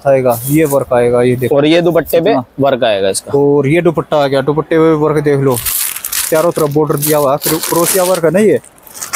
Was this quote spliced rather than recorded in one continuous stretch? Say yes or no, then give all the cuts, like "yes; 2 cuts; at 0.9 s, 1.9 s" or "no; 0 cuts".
no; 0 cuts